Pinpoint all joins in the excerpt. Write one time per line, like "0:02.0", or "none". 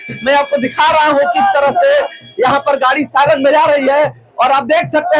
none

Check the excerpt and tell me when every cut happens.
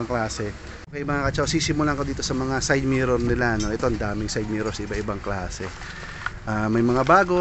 0:01.2

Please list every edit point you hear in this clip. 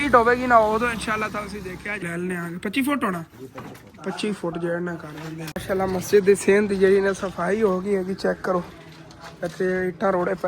0:01.9
0:05.5

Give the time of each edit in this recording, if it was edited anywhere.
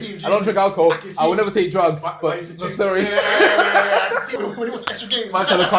0:04.3

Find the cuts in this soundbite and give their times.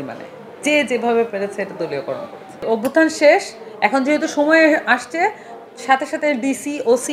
0:02.6

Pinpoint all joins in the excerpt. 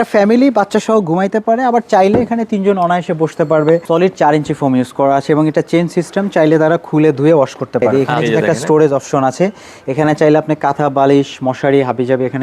0:03.8
0:07.9

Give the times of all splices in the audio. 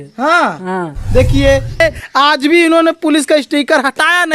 0:01.8

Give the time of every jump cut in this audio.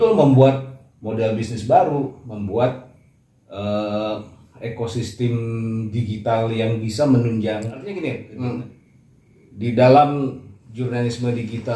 0:07.8

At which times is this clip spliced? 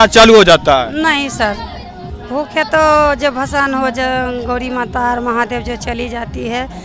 none

